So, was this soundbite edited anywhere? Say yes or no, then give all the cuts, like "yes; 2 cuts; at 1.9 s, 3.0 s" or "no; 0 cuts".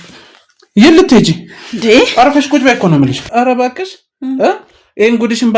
yes; 1 cut; at 3.2 s